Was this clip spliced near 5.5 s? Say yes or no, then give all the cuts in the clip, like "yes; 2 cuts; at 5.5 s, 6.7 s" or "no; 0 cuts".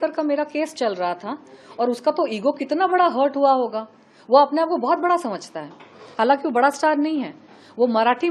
no; 0 cuts